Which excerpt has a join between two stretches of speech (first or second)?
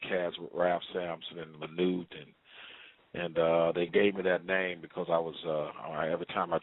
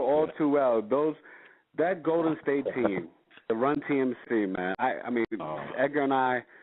second